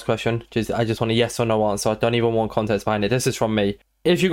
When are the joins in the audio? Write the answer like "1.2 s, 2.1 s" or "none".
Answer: none